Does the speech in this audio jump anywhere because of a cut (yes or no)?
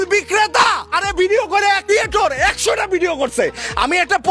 yes